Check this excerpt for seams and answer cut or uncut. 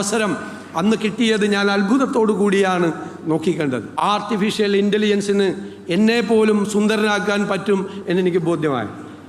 cut